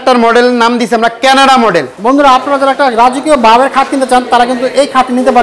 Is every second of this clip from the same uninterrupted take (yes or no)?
no